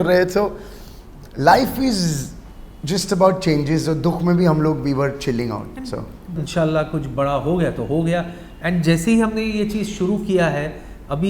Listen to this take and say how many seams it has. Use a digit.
1